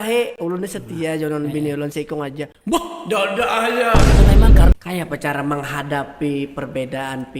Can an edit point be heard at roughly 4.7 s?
yes; 1 cut; at 4.7 s

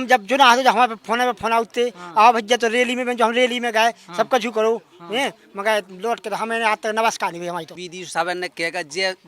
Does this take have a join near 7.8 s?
yes; 1 cut; at 7.8 s

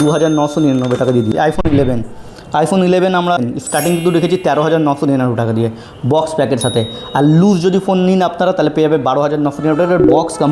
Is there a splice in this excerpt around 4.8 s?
no; 2 cuts; at 1.3 s, 3.4 s

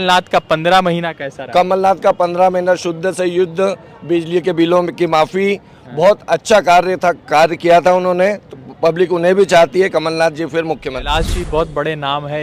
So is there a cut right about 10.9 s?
yes; 1 cut; at 10.9 s

